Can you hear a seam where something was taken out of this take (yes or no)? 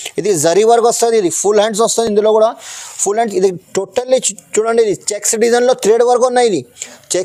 no